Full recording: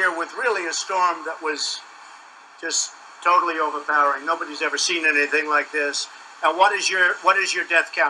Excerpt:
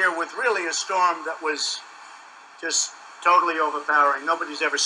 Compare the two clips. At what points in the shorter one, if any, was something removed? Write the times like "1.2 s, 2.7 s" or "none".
none